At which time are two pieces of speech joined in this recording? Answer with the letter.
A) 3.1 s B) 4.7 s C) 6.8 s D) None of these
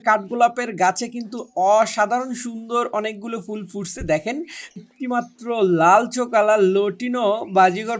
B